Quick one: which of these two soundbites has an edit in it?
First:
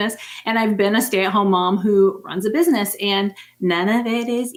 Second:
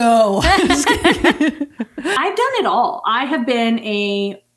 second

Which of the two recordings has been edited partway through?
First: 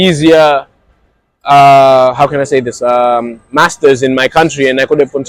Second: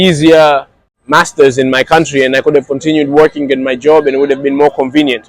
second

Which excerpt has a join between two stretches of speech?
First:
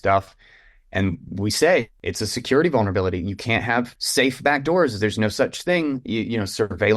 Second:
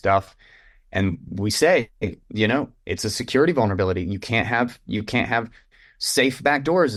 first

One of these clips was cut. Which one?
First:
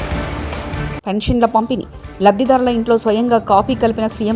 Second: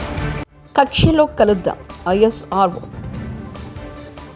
first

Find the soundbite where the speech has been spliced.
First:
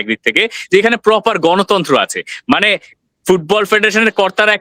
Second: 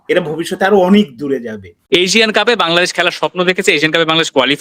second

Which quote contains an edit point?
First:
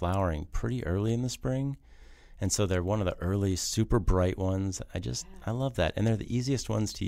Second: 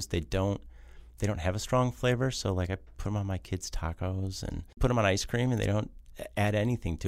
second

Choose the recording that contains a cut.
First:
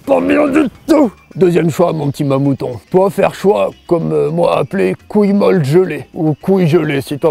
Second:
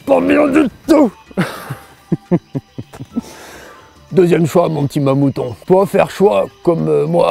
first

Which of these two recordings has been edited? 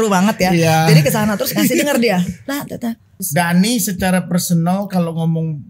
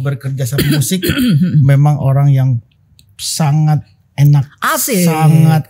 first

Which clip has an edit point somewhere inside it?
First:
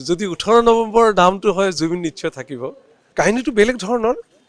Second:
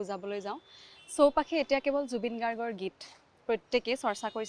first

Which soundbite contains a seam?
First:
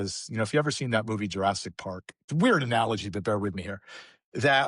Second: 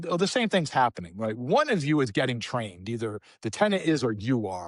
first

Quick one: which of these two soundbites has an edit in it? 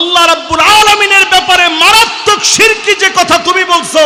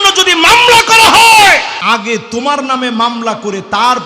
second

